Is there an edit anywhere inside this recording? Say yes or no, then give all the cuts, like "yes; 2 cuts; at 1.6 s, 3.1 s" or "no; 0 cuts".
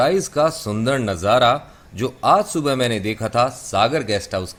no; 0 cuts